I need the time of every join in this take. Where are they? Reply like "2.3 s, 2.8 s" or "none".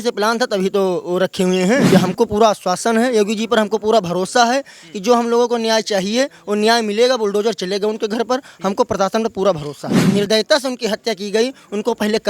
1.9 s, 9.9 s